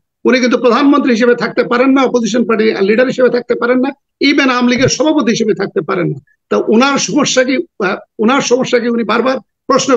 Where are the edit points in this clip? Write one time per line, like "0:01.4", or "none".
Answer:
none